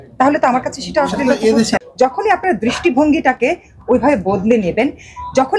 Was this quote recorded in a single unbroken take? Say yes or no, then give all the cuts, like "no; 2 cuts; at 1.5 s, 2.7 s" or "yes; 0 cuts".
no; 1 cut; at 1.8 s